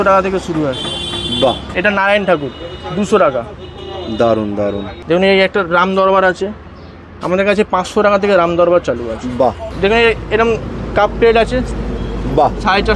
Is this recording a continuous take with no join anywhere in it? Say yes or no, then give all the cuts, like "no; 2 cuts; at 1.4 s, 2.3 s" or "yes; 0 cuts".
no; 3 cuts; at 1.7 s, 4.9 s, 9.7 s